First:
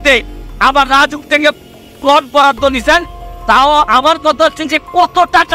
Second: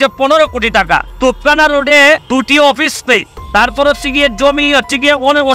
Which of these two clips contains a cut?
second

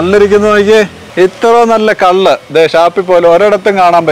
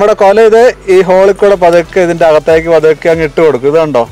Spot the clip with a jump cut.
first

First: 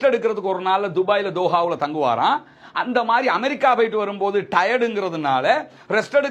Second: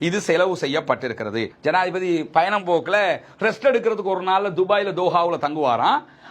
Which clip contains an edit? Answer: second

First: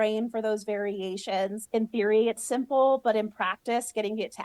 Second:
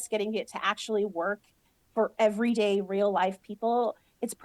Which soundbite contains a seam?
first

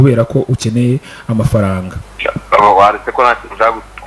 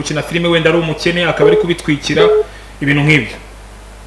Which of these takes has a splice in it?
first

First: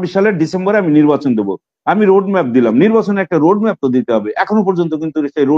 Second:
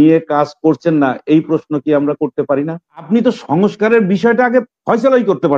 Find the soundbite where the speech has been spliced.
second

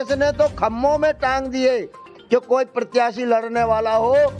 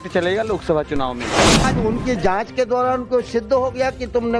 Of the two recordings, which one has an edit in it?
second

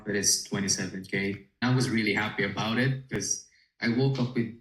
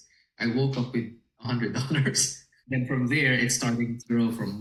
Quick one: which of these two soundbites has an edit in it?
first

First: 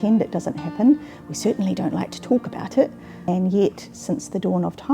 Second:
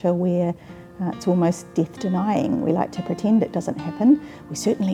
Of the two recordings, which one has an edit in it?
first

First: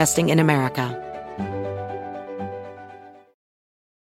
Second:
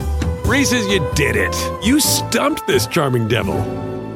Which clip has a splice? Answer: first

